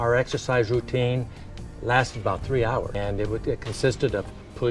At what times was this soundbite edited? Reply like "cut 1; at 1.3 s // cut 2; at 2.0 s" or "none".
cut 1; at 2.9 s

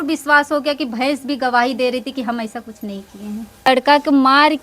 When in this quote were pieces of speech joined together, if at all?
cut 1; at 3.7 s

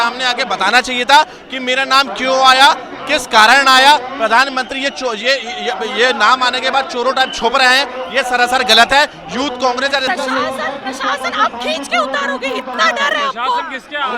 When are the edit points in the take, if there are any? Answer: cut 1; at 10.1 s

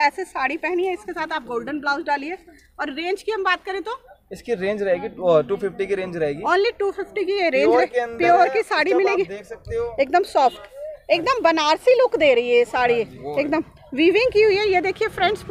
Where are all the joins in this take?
none

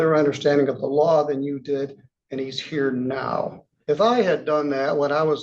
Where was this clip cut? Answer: cut 1; at 3.7 s

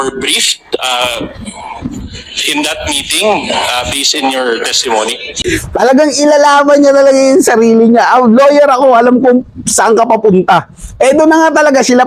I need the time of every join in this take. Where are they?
cut 1; at 5.4 s

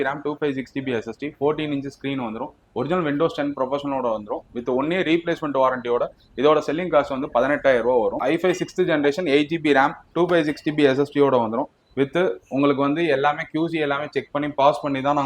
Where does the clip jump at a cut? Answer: cut 1; at 8.2 s

